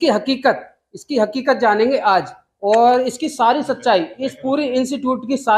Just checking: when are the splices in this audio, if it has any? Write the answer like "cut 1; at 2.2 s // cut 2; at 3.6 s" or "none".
none